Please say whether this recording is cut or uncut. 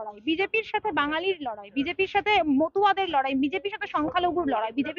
uncut